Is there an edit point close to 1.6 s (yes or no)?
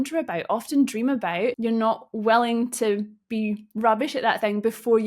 yes